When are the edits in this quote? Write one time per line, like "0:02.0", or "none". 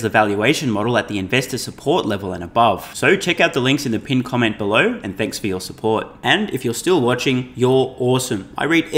none